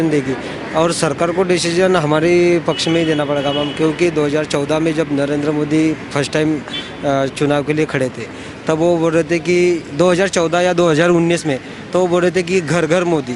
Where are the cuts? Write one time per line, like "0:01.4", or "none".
none